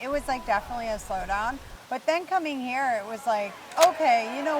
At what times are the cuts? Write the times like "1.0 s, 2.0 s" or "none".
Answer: 3.6 s